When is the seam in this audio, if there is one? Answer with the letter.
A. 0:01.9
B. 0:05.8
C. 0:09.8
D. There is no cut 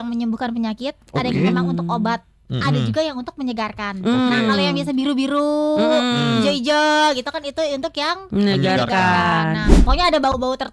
C